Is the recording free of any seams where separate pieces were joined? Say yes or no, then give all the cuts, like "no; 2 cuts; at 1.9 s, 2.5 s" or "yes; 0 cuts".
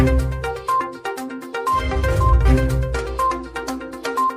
no; 2 cuts; at 0.8 s, 2.4 s